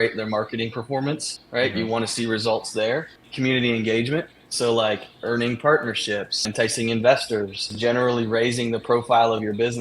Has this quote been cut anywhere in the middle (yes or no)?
yes